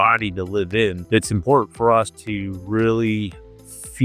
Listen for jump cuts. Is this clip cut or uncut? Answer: cut